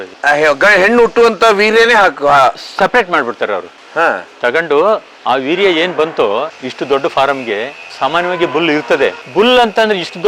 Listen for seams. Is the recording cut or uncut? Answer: cut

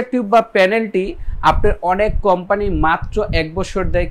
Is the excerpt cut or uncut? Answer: uncut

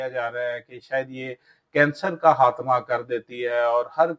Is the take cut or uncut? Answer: uncut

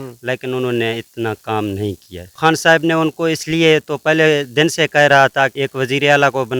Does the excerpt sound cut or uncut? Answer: cut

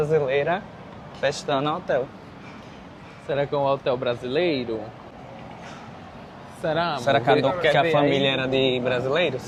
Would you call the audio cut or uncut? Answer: uncut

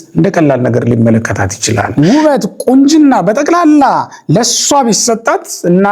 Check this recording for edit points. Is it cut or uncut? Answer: cut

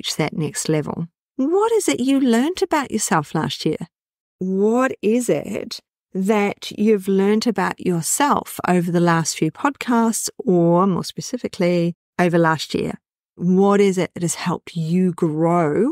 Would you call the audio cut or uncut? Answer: cut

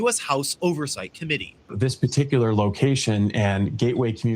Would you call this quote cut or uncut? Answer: cut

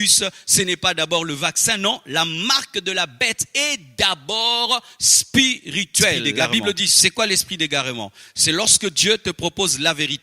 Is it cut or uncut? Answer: cut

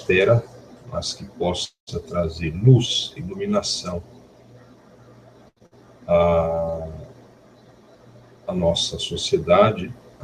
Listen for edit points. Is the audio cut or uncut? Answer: uncut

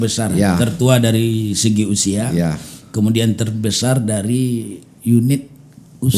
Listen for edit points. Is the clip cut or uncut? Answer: uncut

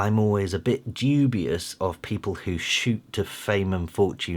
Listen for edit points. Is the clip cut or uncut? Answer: uncut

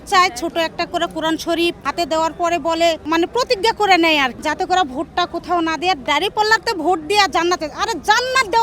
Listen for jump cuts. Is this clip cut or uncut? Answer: cut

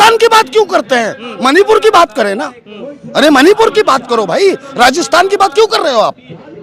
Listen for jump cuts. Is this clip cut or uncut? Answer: uncut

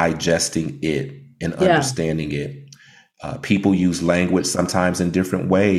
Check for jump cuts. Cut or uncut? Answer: uncut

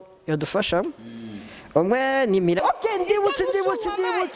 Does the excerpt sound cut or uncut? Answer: cut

